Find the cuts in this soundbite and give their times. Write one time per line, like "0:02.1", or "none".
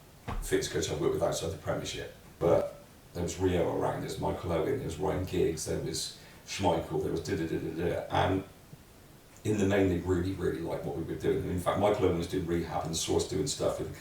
0:02.3

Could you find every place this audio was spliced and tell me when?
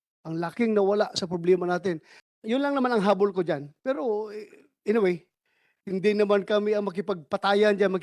0:02.1

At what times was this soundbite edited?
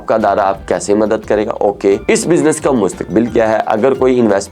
0:02.0

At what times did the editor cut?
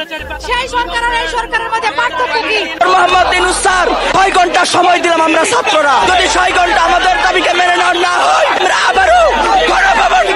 none

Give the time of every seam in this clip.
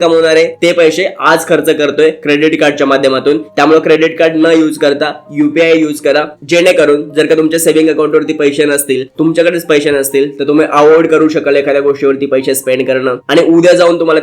none

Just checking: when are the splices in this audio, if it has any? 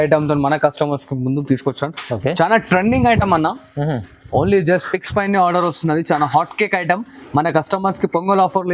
none

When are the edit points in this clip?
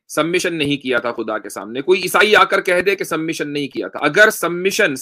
none

